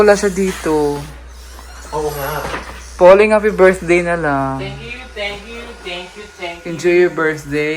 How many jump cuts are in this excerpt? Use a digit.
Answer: 0